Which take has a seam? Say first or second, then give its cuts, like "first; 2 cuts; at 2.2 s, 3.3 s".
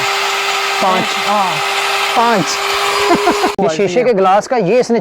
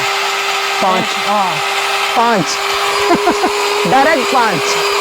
first; 1 cut; at 3.5 s